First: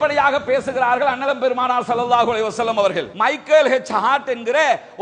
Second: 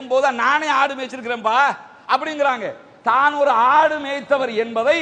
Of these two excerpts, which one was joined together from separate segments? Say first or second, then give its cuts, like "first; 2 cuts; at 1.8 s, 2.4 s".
first; 1 cut; at 3.1 s